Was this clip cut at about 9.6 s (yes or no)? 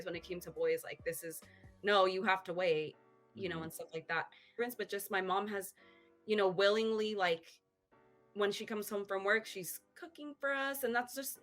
no